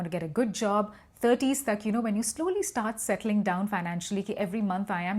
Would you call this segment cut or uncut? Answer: uncut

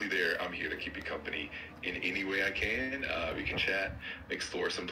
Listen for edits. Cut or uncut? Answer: uncut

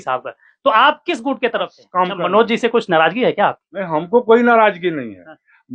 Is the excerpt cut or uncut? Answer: cut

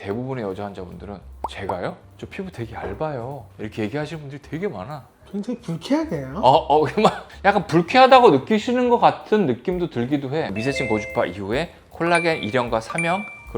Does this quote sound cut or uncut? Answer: cut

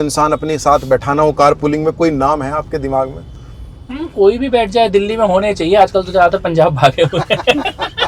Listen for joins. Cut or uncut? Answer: uncut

